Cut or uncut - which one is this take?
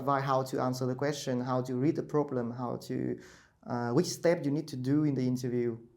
uncut